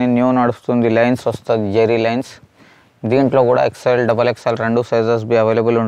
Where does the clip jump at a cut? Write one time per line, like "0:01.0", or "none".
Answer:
none

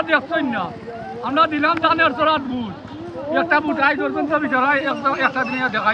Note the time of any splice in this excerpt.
none

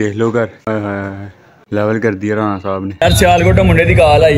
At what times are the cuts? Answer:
0:03.0

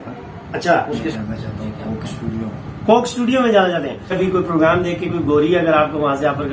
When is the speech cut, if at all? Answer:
0:01.1
0:04.1

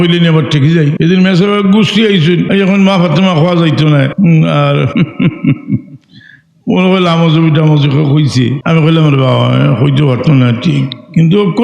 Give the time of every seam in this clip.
0:00.9
0:02.4
0:04.1
0:04.9
0:08.6

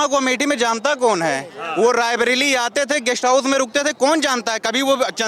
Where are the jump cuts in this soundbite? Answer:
none

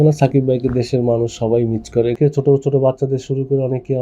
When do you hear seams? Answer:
0:02.1

